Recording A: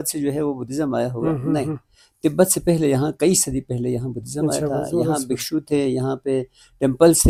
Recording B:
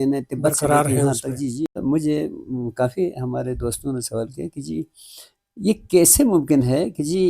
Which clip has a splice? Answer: B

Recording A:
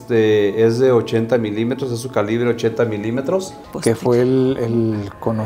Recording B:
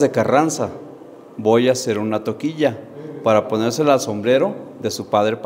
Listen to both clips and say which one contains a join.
A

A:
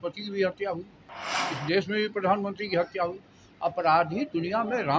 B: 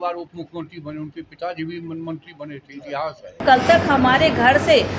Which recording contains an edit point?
B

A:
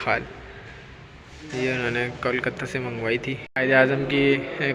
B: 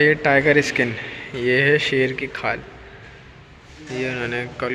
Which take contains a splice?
A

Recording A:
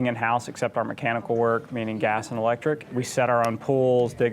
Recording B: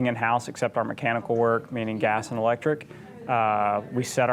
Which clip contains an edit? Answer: A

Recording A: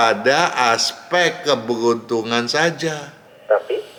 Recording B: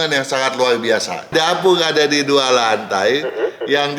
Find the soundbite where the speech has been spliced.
B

